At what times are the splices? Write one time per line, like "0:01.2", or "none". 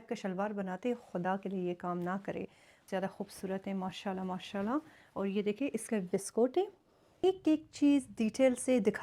0:02.8
0:07.2